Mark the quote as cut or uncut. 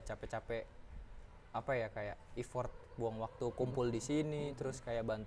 uncut